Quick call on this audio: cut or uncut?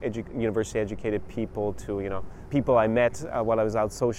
cut